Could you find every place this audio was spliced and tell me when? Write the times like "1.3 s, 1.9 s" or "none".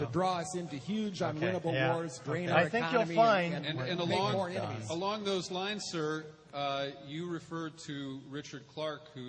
none